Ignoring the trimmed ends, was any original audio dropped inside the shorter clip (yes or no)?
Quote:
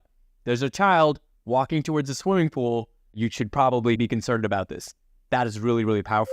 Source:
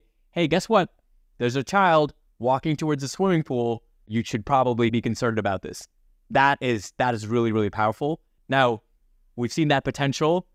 yes